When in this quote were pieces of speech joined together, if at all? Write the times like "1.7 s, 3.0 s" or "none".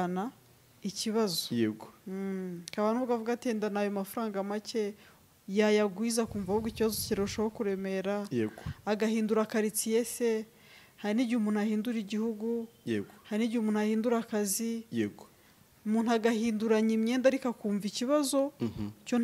none

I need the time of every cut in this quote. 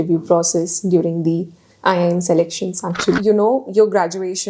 3.2 s

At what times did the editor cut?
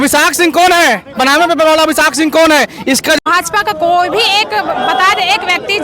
3.2 s

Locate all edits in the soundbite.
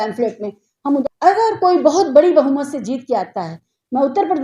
1.0 s

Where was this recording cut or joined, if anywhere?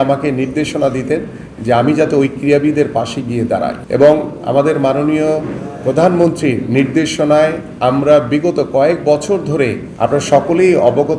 3.8 s, 9.8 s

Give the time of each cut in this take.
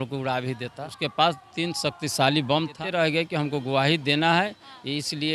0.9 s, 2.8 s

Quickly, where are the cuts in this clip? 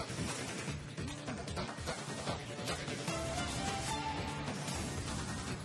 none

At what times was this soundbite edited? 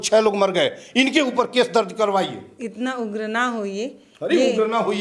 none

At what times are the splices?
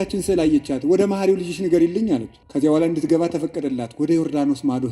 2.4 s

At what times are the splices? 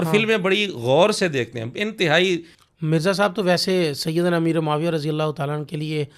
2.6 s

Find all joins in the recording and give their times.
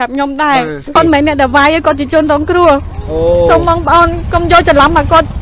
1.0 s

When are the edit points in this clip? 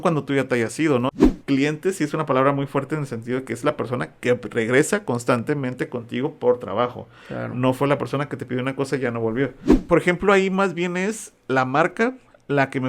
1.2 s, 9.7 s

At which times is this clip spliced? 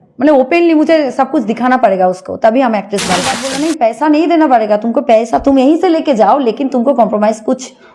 3.5 s

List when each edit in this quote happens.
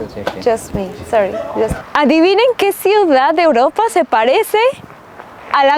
1.8 s

